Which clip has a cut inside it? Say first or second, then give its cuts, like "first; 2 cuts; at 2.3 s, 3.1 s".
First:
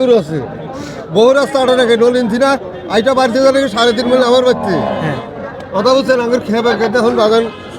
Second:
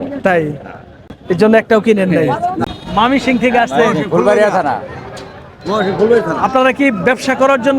second; 1 cut; at 2.6 s